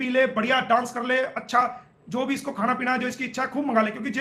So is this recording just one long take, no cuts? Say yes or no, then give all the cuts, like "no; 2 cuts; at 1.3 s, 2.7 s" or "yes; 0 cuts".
yes; 0 cuts